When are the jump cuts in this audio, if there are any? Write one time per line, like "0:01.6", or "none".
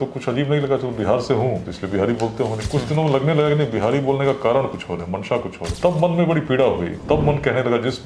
0:01.7
0:05.6
0:06.9